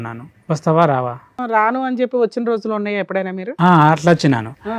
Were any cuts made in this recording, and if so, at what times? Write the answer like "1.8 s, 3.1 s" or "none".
1.4 s